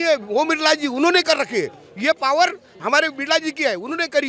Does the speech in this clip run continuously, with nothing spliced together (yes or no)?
yes